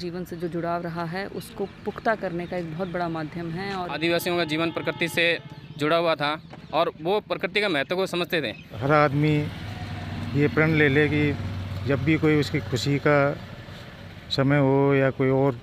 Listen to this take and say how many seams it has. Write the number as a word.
two